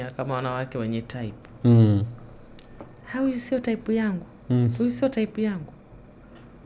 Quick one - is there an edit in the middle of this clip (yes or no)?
no